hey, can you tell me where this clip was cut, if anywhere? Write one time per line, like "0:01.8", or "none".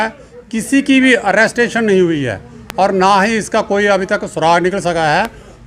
none